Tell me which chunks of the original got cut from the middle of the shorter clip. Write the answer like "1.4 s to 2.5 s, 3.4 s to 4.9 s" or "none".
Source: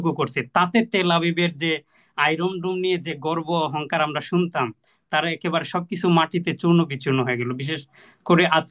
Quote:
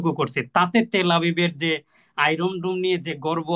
none